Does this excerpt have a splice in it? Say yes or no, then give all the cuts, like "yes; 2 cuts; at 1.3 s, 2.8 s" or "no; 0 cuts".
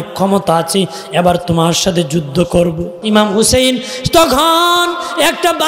yes; 1 cut; at 2.9 s